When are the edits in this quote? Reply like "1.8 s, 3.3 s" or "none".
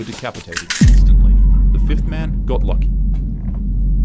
none